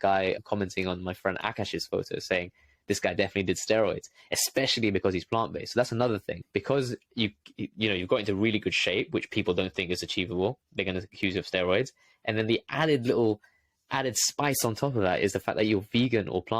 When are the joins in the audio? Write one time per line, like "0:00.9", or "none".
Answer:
none